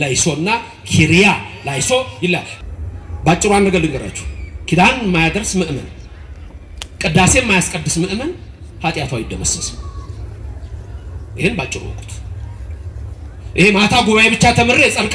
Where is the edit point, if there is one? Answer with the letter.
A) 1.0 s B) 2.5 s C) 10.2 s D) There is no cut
B